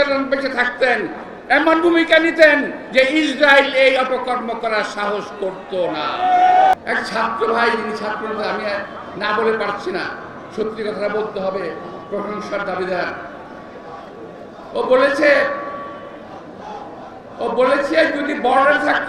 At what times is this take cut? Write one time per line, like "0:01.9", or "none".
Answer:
0:06.7